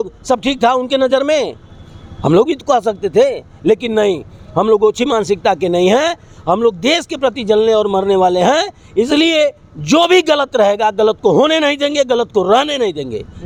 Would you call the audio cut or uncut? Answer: uncut